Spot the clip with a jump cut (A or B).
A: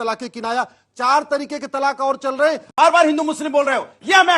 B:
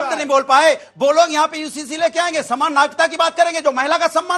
A